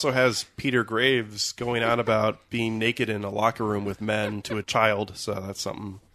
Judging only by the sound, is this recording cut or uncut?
uncut